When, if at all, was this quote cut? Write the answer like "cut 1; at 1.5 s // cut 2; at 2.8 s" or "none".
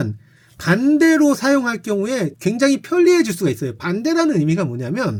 none